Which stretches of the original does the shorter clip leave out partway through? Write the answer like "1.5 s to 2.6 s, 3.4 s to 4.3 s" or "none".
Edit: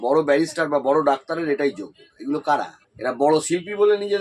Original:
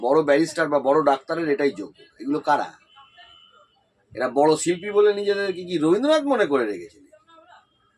2.8 s to 4.0 s

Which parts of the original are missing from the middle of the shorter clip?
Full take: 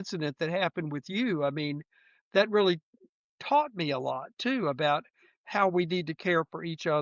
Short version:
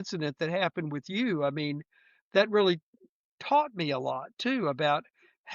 none

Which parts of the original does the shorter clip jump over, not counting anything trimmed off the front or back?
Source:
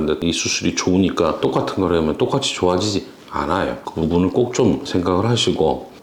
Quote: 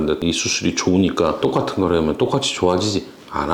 none

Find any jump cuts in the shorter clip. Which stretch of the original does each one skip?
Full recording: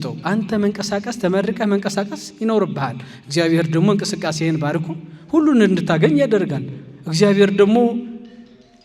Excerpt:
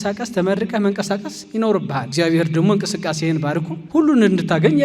2.9 s to 3.2 s, 4.9 s to 5.1 s

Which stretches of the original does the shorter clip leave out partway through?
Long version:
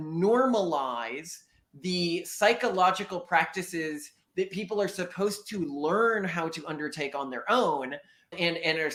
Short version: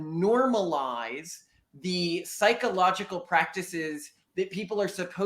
none

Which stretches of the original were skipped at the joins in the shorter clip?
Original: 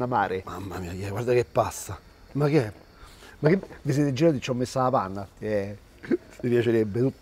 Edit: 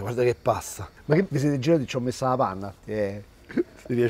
2.3 s to 3.7 s

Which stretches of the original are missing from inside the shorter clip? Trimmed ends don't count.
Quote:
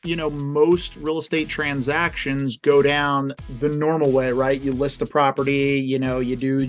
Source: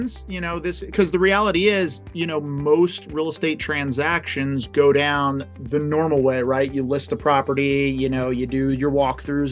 none

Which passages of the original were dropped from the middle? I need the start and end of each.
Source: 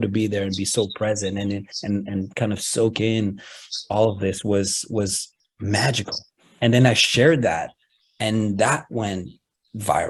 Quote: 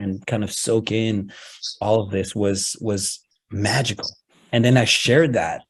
none

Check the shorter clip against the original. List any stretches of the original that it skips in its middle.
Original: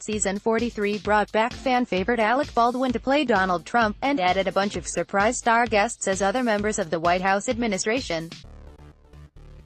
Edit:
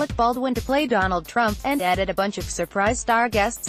none

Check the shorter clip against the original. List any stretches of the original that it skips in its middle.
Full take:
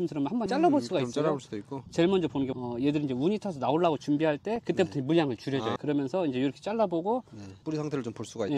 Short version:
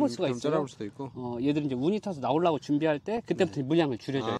1.9 s to 2.5 s

